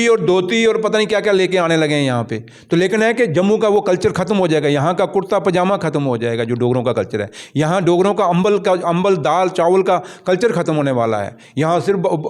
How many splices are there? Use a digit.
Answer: 0